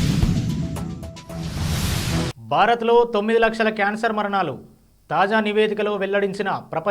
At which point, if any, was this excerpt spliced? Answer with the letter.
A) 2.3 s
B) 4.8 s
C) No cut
A